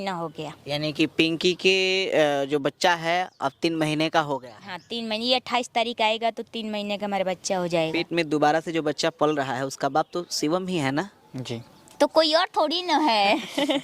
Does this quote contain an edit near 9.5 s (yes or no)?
no